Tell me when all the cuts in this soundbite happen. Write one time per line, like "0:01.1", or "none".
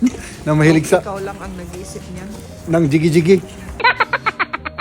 0:03.6